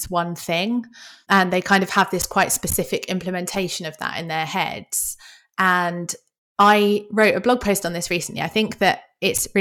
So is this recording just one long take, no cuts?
no; 1 cut; at 1.2 s

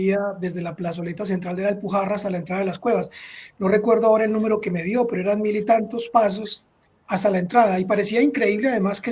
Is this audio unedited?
yes; 0 cuts

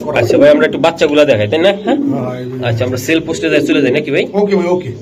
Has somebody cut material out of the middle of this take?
no; 0 cuts

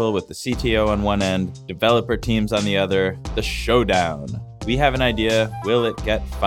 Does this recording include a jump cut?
yes; 1 cut; at 1.6 s

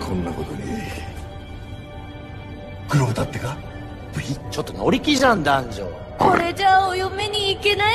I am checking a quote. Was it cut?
yes; 1 cut; at 3.1 s

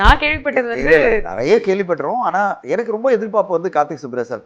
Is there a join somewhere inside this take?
yes; 1 cut; at 2.6 s

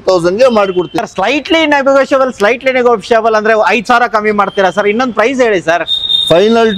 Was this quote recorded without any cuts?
no; 1 cut; at 1.0 s

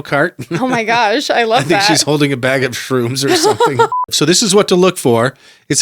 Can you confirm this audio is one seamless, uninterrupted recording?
no; 1 cut; at 3.9 s

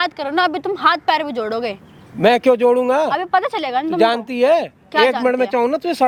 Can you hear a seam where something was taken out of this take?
no; 0 cuts

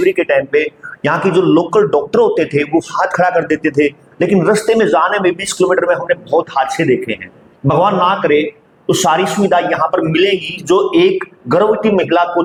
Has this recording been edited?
no; 0 cuts

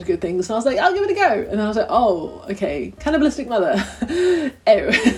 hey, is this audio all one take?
yes; 0 cuts

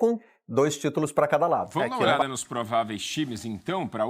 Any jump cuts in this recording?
yes; 1 cut; at 2.2 s

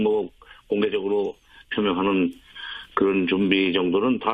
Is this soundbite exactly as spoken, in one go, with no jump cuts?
no; 1 cut; at 1.5 s

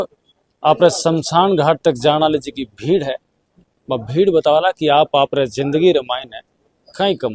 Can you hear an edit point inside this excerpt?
no; 0 cuts

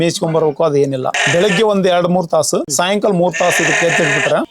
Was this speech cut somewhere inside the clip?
yes; 2 cuts; at 1.1 s, 2.7 s

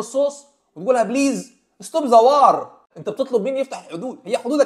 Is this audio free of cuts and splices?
no; 1 cut; at 2.8 s

